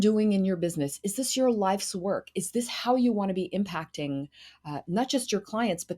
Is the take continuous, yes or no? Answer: yes